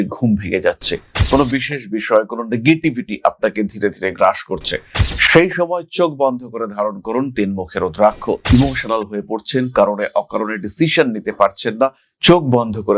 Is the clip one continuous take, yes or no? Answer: yes